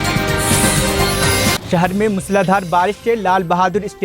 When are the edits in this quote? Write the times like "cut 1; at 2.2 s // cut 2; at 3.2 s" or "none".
cut 1; at 1.6 s